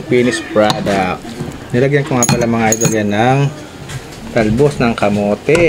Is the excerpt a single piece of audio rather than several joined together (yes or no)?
yes